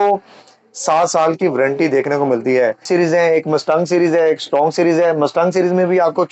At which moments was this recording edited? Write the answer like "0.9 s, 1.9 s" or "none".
2.8 s

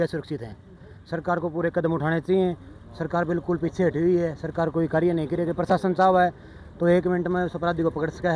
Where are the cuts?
none

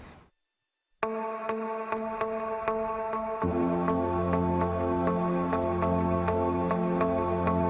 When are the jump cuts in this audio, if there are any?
3.2 s

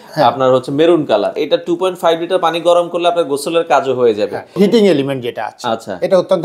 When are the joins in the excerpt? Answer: 1.4 s, 4.5 s

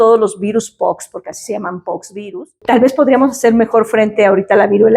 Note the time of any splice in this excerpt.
2.5 s

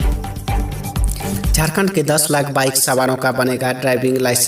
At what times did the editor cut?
1.5 s

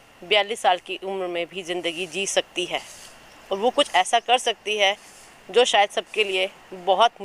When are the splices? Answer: none

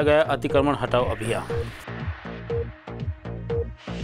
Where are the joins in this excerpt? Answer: 1.4 s

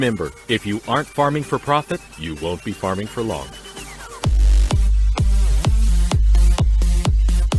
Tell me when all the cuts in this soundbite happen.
none

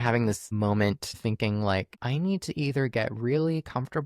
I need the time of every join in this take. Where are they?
1.2 s, 2.0 s

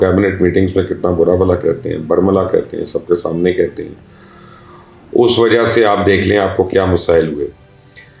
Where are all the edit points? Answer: none

